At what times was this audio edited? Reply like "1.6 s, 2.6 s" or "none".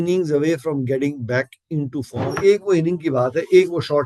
2.3 s